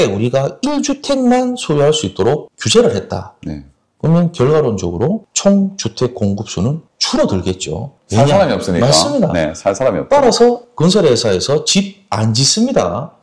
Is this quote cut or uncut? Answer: uncut